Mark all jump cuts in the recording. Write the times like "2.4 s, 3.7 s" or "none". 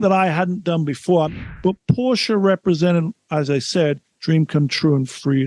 1.3 s